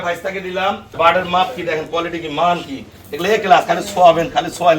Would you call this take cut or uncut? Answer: cut